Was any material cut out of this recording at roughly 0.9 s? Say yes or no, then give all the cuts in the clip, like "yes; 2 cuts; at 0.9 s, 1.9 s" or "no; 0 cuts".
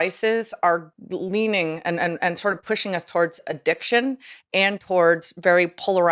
yes; 1 cut; at 0.9 s